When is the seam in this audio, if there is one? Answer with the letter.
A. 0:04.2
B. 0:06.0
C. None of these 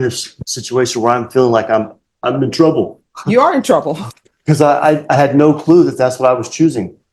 C